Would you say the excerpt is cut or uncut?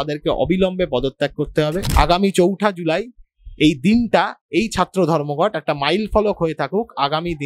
cut